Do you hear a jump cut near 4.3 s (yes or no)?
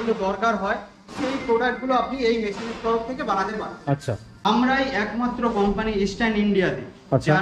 yes